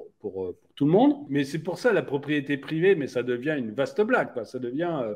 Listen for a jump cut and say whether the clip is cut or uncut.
cut